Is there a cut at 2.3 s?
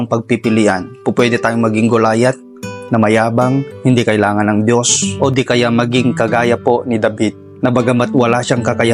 no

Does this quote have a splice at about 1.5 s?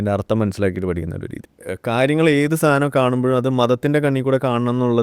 yes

